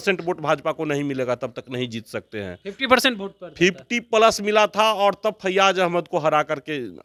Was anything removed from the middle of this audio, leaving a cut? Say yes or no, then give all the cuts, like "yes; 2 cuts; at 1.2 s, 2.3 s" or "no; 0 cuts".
no; 0 cuts